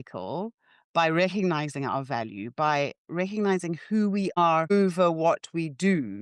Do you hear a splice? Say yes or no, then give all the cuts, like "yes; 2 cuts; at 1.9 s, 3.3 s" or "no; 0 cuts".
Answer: yes; 1 cut; at 4.5 s